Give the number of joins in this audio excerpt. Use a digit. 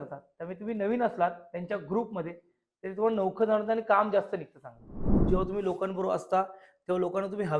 1